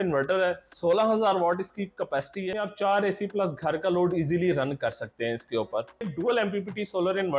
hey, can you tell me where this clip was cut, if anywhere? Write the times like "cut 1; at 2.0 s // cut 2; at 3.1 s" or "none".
cut 1; at 2.5 s // cut 2; at 6.1 s